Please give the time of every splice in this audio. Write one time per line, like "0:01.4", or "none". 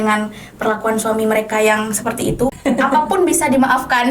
0:02.6